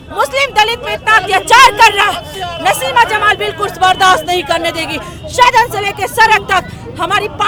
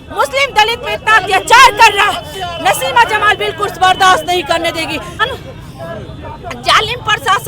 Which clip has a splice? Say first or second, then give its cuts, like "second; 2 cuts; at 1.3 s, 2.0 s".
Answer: second; 1 cut; at 5.2 s